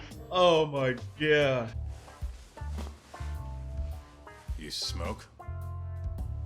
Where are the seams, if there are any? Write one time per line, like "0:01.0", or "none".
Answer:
0:01.8